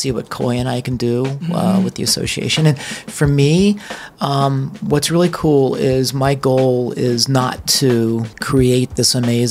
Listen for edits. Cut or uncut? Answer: cut